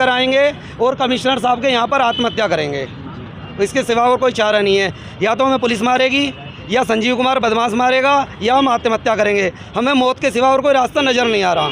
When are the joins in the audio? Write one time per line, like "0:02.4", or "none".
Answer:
none